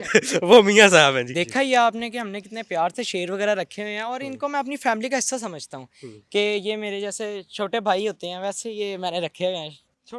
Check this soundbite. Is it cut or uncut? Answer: uncut